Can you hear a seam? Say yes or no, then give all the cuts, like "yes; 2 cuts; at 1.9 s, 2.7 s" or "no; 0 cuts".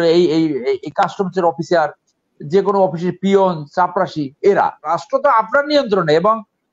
yes; 1 cut; at 4.9 s